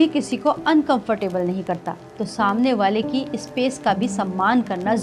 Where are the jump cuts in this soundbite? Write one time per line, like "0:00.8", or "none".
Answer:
none